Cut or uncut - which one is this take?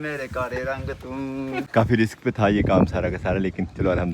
cut